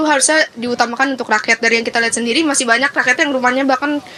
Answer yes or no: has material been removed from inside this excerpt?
no